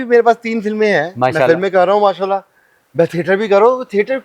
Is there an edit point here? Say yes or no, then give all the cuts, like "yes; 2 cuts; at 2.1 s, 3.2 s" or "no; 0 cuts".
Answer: no; 0 cuts